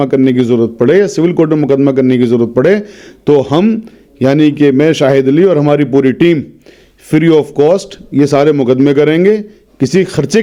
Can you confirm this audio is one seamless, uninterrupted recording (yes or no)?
yes